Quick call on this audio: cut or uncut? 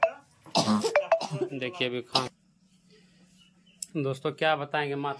cut